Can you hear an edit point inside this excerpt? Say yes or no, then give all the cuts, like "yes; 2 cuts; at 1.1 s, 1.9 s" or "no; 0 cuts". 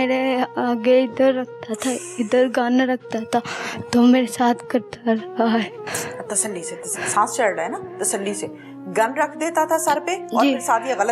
yes; 1 cut; at 5.8 s